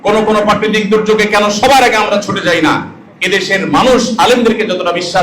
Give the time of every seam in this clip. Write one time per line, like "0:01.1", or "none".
none